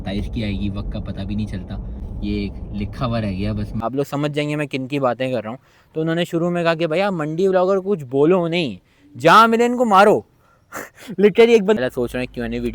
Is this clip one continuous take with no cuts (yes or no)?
no